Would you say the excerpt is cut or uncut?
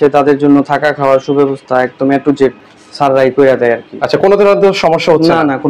uncut